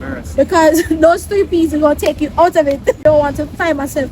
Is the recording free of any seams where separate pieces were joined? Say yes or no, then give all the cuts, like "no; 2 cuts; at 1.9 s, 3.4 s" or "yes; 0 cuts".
no; 1 cut; at 3.0 s